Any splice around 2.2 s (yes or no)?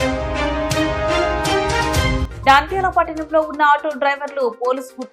no